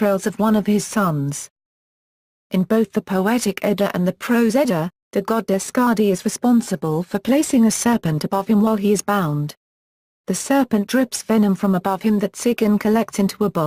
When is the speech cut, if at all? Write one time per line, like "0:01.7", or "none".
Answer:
0:11.8